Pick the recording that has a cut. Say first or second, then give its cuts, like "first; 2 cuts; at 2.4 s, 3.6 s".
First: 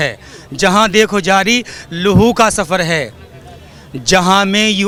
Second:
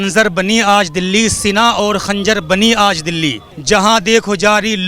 second; 1 cut; at 3.5 s